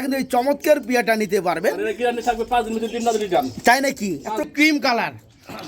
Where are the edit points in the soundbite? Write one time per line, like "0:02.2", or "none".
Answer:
0:04.5